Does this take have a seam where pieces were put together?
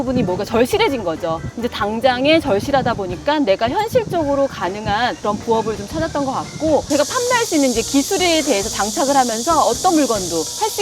yes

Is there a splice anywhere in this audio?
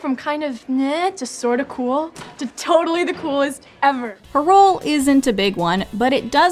no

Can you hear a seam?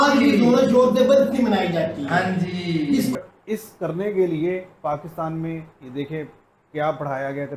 yes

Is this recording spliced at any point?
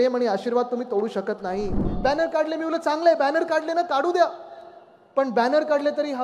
yes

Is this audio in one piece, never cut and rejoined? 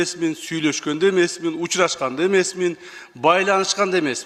yes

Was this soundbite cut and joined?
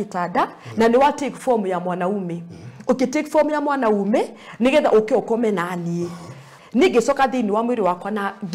yes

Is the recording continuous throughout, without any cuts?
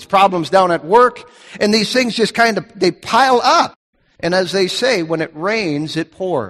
no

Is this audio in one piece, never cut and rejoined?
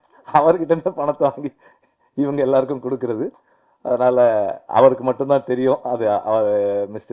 yes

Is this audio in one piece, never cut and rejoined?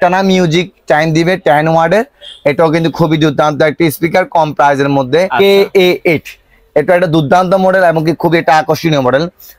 no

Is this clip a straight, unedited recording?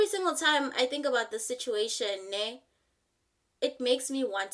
yes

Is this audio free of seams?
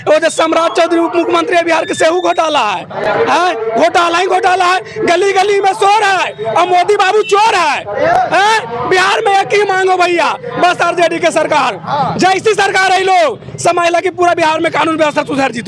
yes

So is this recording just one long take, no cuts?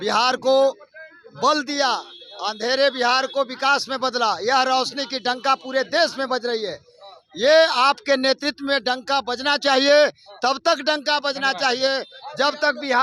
yes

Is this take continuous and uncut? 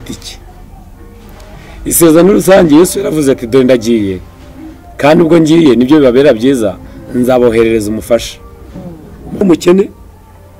no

